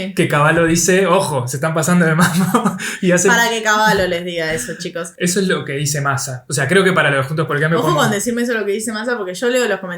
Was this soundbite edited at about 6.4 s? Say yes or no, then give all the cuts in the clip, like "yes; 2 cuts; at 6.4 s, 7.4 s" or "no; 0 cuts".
yes; 2 cuts; at 5.0 s, 6.4 s